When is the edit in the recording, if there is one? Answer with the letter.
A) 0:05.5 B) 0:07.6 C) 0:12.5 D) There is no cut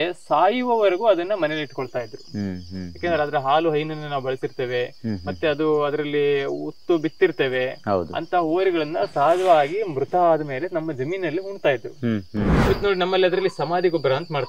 C